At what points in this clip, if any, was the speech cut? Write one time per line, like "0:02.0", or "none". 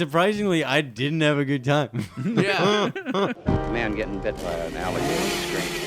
0:03.4